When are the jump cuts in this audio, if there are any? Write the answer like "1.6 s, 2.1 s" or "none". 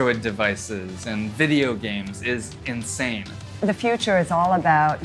3.6 s